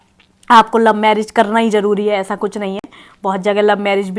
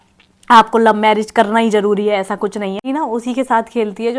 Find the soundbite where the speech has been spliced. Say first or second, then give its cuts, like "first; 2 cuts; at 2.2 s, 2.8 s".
second; 1 cut; at 2.8 s